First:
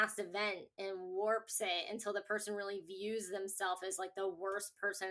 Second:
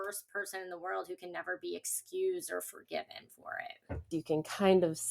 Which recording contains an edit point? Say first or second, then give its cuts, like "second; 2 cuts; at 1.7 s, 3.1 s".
second; 1 cut; at 4.1 s